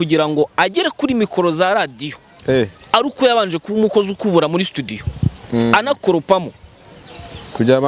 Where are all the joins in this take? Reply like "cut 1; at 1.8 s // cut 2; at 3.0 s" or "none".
none